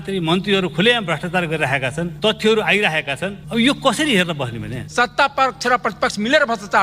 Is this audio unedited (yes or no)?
no